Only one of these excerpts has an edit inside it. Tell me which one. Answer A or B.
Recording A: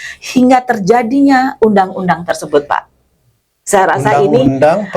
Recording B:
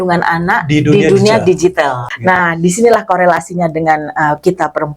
B